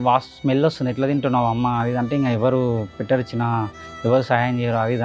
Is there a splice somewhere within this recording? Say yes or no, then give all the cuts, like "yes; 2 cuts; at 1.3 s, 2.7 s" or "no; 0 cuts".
no; 0 cuts